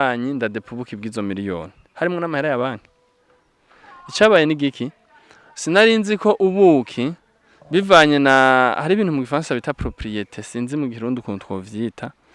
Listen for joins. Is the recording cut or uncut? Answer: uncut